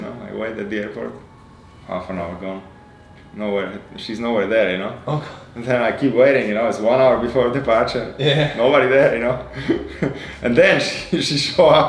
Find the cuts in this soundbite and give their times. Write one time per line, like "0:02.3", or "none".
none